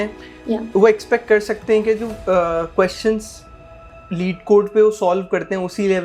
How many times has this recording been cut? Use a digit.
0